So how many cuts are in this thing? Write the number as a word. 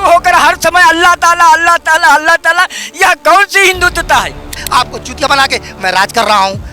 one